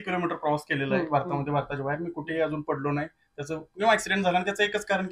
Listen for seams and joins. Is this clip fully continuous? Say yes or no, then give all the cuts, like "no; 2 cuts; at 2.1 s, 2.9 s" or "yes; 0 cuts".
yes; 0 cuts